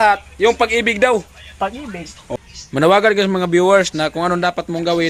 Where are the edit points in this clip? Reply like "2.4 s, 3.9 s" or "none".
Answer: 2.3 s